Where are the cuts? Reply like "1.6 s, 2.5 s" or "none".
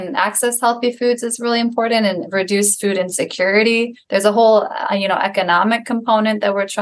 none

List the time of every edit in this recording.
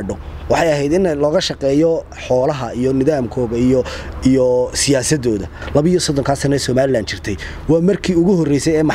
5.6 s

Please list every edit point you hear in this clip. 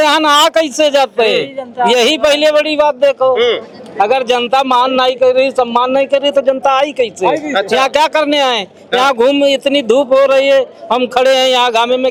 none

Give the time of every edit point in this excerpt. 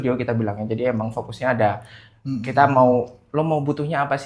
none

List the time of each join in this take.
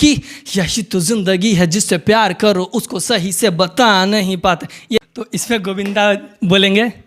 5.1 s

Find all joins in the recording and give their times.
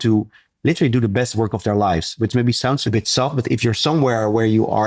2.8 s, 3.8 s

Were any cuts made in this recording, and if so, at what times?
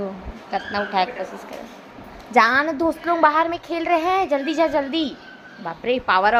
none

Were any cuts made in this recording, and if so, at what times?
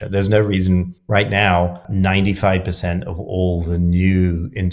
1.0 s, 1.9 s

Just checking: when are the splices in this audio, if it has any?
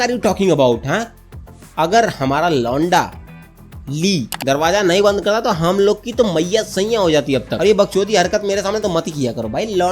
none

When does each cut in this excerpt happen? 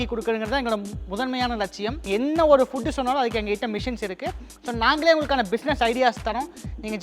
1.9 s

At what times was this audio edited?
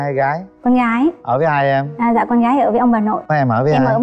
none

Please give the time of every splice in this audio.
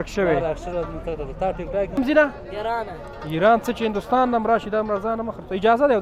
2.0 s

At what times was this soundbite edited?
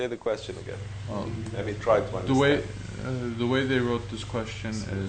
2.2 s

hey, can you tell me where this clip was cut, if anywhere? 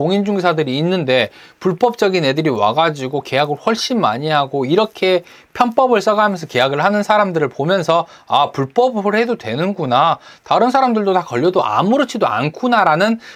none

